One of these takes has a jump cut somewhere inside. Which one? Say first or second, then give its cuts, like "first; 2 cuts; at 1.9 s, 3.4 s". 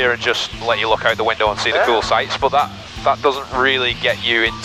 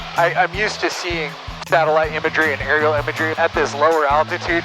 second; 1 cut; at 3.3 s